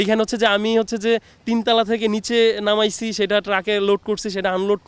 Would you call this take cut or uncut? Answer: uncut